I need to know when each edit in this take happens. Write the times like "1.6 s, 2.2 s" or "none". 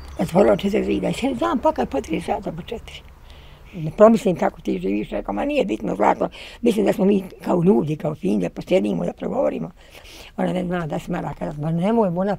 3.8 s